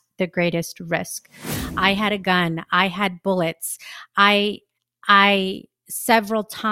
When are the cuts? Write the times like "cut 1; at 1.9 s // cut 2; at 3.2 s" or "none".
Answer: cut 1; at 1.5 s